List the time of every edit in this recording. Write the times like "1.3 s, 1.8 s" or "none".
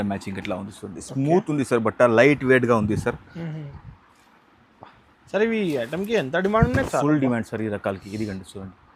3.7 s